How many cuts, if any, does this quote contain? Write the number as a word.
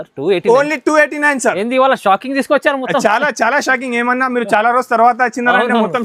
zero